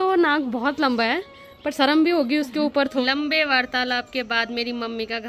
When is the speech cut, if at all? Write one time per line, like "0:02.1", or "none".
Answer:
0:03.0